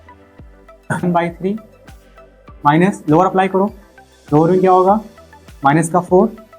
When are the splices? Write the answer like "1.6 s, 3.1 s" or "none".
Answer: 1.0 s